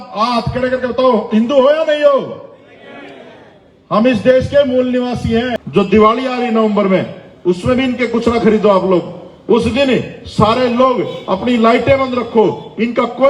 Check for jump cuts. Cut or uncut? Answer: cut